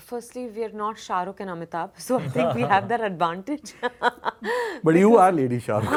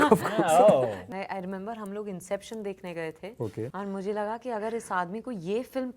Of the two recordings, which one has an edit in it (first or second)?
second